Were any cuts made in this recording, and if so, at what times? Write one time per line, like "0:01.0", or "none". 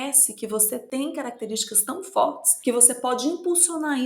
0:00.8
0:02.5